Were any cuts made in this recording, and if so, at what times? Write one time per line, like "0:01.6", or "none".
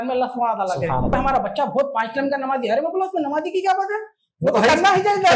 0:01.1